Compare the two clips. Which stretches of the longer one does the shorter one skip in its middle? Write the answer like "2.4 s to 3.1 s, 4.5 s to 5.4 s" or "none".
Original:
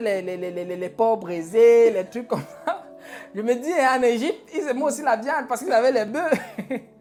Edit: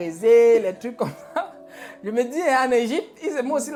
none